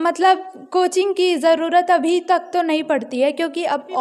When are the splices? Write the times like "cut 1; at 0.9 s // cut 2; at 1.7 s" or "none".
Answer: none